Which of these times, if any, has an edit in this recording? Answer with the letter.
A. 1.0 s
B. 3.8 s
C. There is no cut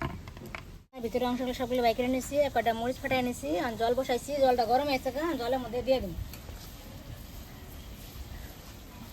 A